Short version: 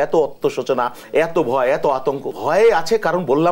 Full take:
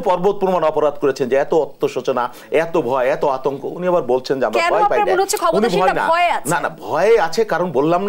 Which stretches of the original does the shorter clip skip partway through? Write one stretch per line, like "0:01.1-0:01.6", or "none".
0:03.7-0:06.8